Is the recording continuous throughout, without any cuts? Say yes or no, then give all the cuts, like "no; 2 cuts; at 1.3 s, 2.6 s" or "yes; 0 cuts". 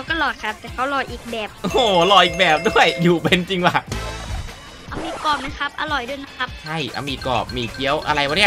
no; 1 cut; at 4.8 s